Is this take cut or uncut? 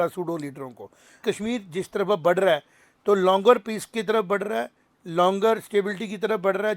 cut